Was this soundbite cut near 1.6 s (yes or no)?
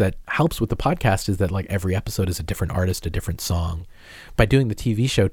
no